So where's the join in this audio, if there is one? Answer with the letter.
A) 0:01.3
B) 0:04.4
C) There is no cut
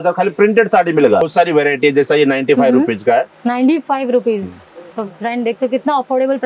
A